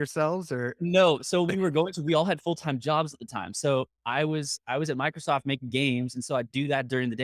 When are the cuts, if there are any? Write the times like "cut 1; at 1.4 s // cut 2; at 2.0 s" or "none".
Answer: none